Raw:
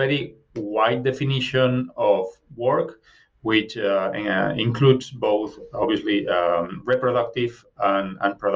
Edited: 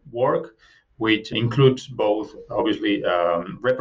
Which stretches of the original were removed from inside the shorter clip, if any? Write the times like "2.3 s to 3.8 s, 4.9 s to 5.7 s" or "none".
3.8 s to 4.5 s